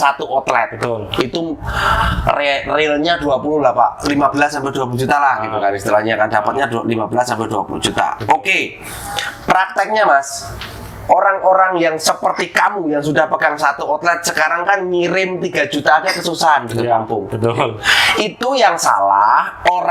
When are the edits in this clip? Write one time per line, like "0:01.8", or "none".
none